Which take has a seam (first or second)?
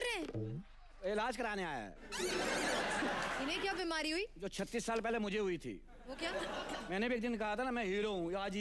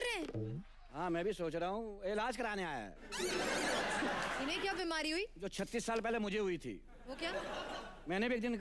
first